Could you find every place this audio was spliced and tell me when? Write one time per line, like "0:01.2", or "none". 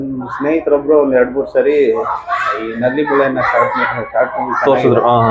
none